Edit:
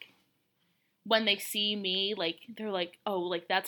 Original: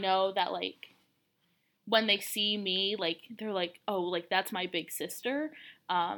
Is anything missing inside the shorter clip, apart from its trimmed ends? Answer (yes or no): no